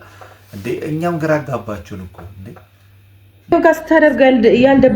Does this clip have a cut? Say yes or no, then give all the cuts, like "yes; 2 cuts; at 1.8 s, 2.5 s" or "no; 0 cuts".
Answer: yes; 1 cut; at 3.5 s